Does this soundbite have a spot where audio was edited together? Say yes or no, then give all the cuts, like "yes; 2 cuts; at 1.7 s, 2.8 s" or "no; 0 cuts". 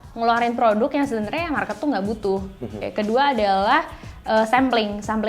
yes; 1 cut; at 2.9 s